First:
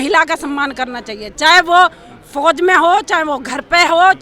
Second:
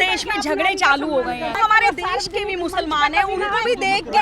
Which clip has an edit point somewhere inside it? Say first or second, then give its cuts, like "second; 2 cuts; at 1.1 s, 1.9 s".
second; 1 cut; at 1.6 s